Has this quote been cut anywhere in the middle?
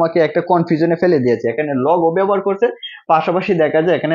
no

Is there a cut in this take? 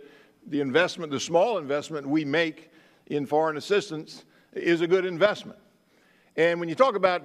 no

